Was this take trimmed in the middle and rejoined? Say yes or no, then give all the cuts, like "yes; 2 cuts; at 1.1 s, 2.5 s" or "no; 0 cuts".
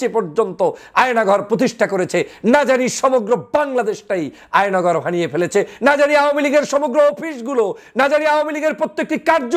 no; 0 cuts